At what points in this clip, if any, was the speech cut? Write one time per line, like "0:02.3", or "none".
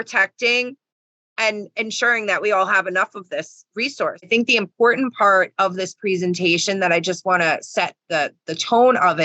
0:04.3